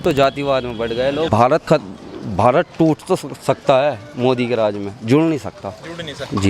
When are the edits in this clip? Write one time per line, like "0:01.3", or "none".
none